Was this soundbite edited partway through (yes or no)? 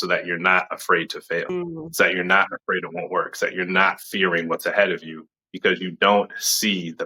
yes